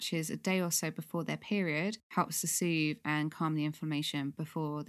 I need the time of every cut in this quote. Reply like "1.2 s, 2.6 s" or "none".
2.0 s

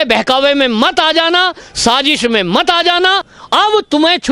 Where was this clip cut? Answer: 3.3 s

